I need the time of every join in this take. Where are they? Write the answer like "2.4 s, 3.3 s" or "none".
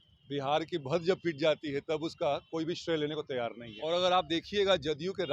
3.7 s